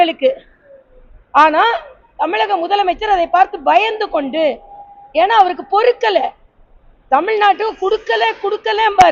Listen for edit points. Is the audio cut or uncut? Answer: uncut